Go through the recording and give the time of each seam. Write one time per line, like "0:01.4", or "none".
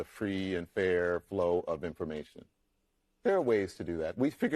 none